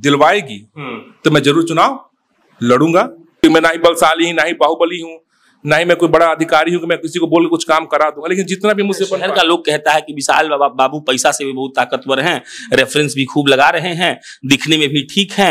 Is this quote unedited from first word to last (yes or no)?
no